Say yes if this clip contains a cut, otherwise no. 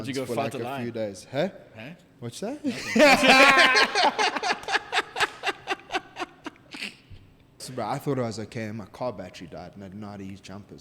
yes